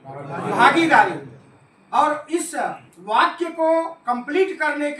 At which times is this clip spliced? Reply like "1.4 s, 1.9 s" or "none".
none